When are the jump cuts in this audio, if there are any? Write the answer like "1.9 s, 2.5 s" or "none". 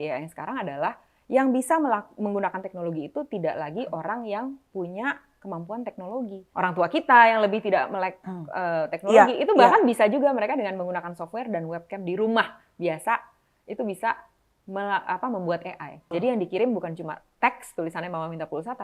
6.4 s, 16.1 s